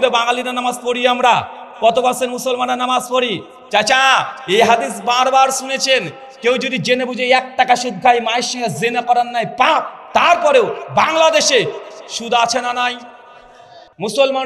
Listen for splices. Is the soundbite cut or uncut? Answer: uncut